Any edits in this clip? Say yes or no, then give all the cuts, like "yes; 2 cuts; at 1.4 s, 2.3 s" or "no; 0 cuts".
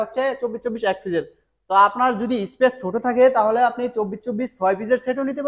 no; 0 cuts